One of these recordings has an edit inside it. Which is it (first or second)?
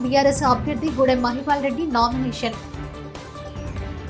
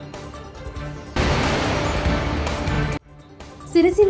second